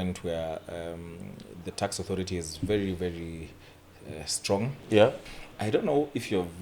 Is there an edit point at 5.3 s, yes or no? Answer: yes